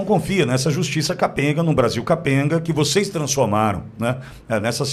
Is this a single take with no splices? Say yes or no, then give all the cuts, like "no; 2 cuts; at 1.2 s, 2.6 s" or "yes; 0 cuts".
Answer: yes; 0 cuts